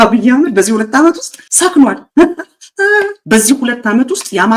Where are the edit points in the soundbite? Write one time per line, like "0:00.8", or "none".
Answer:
none